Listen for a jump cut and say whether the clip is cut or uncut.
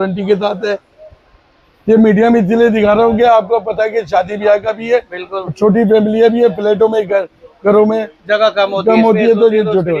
uncut